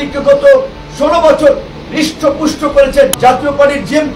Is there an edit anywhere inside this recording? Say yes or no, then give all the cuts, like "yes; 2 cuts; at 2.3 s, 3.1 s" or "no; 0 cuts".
yes; 1 cut; at 3.1 s